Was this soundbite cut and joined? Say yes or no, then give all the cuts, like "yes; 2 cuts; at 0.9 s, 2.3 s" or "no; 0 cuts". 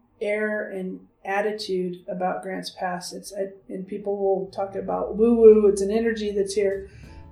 no; 0 cuts